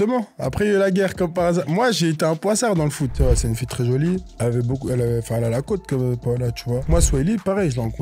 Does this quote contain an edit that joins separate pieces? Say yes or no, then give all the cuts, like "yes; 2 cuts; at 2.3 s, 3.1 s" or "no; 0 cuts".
yes; 2 cuts; at 3.1 s, 6.8 s